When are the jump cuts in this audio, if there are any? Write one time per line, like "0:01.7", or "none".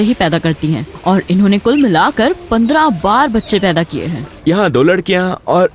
0:04.3